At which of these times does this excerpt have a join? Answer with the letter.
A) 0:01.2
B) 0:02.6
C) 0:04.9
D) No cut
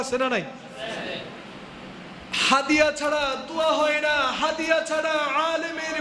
D